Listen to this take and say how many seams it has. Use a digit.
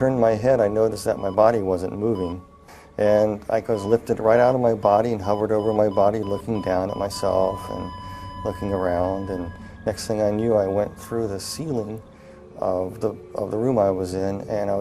1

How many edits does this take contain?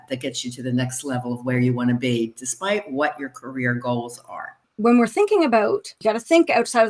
2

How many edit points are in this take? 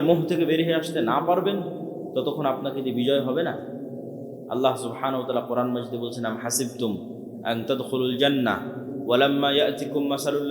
0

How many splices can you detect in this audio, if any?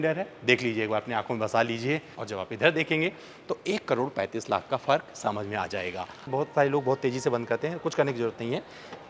2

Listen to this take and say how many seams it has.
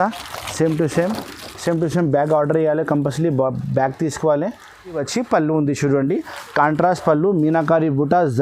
1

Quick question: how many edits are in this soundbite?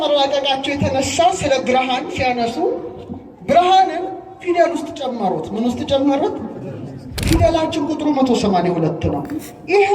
1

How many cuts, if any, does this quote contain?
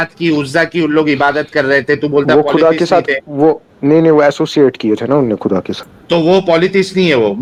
0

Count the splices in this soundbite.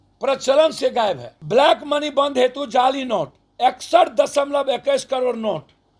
1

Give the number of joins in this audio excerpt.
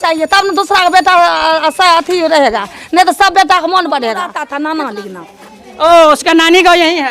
1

